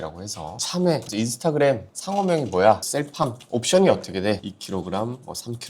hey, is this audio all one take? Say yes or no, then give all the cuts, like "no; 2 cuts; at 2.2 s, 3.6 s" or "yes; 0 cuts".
no; 1 cut; at 1.1 s